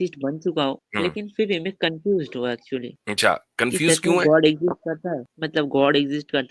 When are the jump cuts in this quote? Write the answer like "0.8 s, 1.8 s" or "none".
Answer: 0.8 s, 3.0 s, 5.3 s

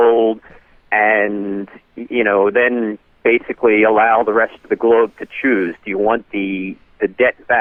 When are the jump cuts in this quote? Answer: none

